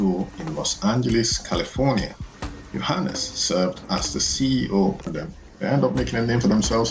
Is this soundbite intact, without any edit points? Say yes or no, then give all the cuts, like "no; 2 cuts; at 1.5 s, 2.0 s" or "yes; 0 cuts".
no; 1 cut; at 5.0 s